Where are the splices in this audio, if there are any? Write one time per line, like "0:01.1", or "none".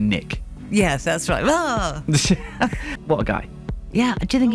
0:02.8